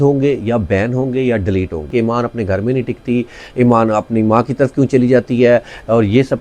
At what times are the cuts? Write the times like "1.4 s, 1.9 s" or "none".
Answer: 1.9 s